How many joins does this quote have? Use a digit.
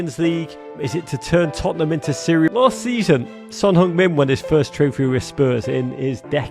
1